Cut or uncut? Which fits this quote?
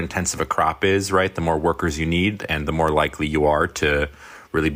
uncut